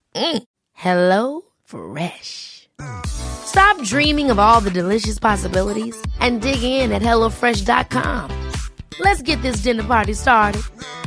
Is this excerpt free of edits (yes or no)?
yes